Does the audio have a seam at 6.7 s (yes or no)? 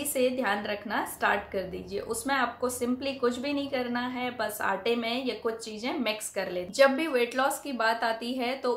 yes